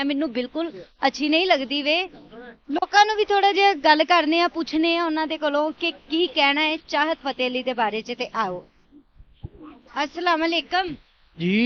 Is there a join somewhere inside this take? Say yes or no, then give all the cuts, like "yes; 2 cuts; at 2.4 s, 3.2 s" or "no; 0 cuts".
no; 0 cuts